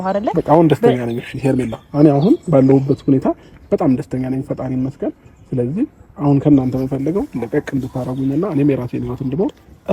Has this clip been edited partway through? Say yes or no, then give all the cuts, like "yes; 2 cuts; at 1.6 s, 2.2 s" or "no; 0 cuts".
no; 0 cuts